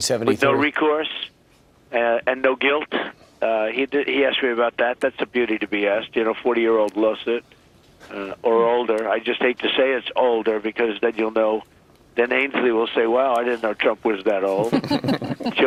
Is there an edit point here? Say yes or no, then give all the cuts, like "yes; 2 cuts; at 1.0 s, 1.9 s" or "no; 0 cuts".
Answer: no; 0 cuts